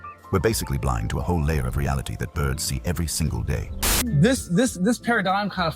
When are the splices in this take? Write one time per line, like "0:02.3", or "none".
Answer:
0:04.0